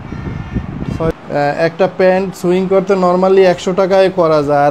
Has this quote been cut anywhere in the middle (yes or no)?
yes